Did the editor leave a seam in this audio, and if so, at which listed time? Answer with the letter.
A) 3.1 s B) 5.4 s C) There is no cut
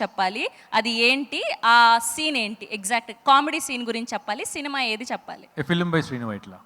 B